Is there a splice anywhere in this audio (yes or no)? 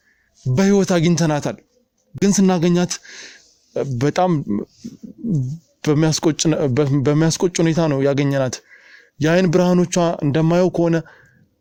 no